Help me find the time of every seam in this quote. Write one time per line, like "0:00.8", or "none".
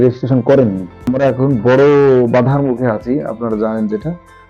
0:01.1